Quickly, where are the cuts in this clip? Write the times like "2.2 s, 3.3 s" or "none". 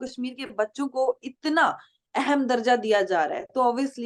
none